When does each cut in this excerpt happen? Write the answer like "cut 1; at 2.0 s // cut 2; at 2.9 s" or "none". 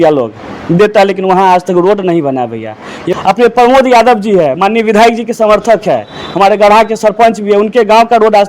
cut 1; at 3.1 s